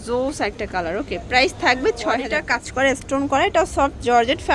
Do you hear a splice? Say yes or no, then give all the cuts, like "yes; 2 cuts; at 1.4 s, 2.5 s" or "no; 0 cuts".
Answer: yes; 1 cut; at 2.3 s